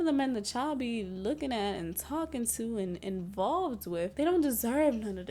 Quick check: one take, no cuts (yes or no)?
yes